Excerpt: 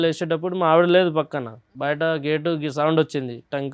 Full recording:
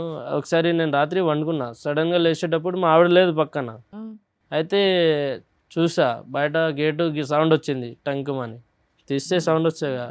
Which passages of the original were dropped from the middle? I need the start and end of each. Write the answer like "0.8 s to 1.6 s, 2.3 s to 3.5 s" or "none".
3.9 s to 6.2 s